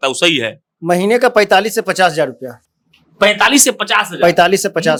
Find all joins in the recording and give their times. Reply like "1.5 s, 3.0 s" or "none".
none